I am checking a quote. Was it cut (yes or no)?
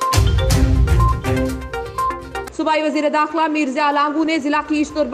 yes